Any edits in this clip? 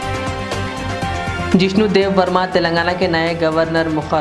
yes; 1 cut; at 1.5 s

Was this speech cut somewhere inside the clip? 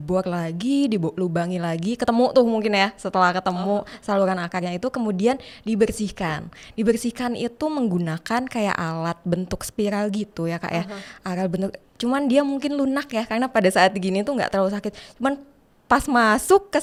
no; 0 cuts

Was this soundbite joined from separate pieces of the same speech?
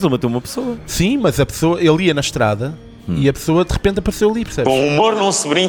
yes; 1 cut; at 4.6 s

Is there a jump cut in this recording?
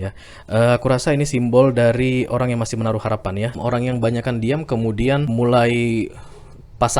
yes; 2 cuts; at 3.5 s, 5.3 s

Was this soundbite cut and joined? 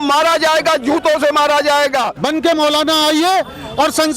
yes; 1 cut; at 2.1 s

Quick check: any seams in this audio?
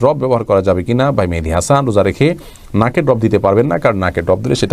no; 0 cuts

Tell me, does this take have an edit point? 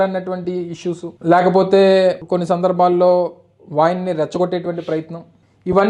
yes; 1 cut; at 1.1 s

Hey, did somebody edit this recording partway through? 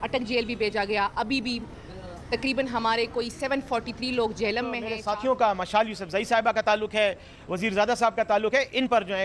yes; 1 cut; at 4.9 s

